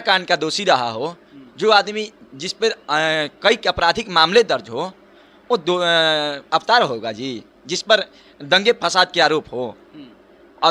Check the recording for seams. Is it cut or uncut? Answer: uncut